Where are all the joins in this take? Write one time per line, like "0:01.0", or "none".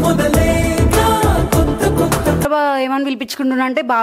0:02.4